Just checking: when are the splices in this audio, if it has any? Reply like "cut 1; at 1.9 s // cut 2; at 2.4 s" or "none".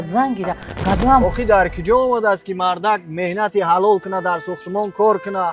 cut 1; at 1.2 s